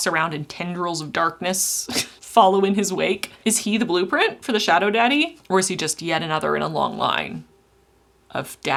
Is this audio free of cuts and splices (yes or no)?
yes